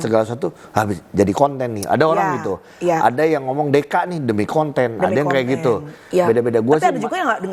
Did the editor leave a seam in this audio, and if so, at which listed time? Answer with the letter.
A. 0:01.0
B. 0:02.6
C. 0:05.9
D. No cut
C